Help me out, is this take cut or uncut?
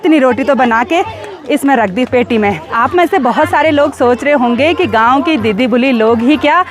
cut